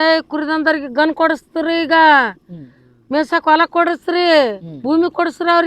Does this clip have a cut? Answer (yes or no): no